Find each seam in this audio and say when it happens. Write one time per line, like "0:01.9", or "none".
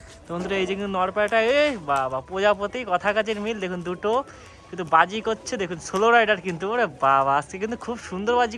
none